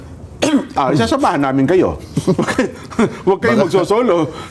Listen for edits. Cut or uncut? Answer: uncut